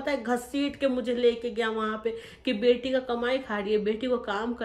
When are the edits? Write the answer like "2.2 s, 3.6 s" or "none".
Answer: none